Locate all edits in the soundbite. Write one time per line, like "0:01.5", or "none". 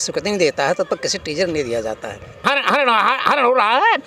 0:02.4